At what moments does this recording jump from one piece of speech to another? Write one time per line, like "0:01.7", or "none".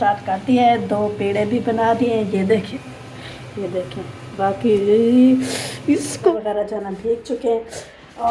0:02.6
0:06.3